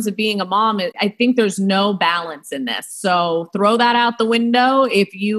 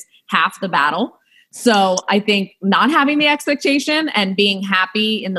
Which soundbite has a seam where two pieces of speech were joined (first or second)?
first